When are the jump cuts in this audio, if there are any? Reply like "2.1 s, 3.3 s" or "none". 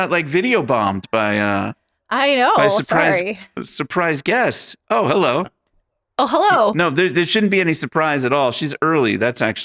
none